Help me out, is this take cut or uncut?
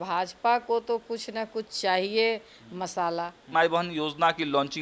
cut